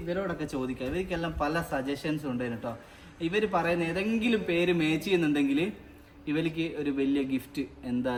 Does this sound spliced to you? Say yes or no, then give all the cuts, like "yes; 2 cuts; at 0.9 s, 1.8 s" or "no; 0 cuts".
no; 0 cuts